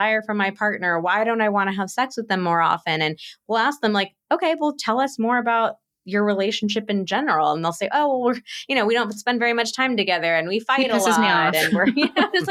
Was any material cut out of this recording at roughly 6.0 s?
no; 0 cuts

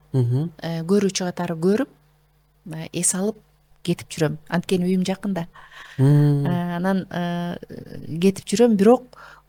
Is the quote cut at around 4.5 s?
no; 0 cuts

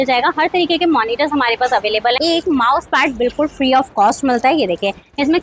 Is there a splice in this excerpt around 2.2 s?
yes; 1 cut; at 2.2 s

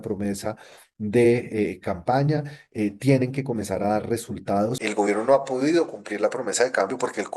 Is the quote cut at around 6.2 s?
no; 1 cut; at 4.8 s

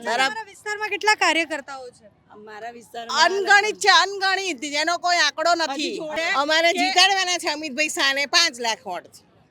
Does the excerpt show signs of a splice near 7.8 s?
no; 1 cut; at 6.1 s

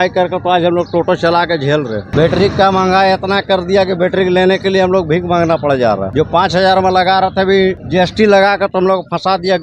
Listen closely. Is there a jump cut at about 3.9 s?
no; 3 cuts; at 2.1 s, 6.1 s, 7.8 s

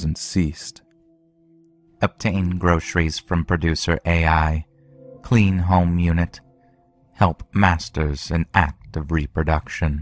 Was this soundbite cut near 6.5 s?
no; 1 cut; at 2.4 s

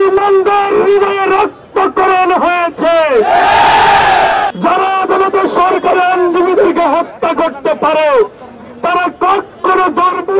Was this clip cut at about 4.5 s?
yes; 1 cut; at 4.5 s

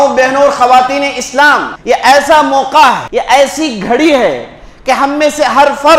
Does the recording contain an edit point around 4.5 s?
no; 2 cuts; at 1.7 s, 3.1 s

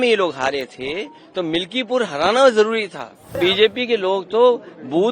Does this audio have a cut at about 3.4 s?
yes; 1 cut; at 3.4 s

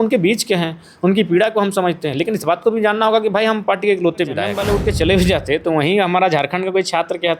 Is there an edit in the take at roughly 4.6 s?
yes; 1 cut; at 4.6 s

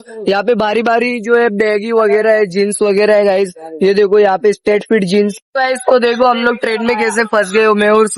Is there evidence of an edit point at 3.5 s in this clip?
no; 1 cut; at 5.4 s

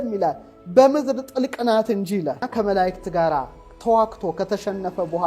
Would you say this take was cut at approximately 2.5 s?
yes; 1 cut; at 2.5 s

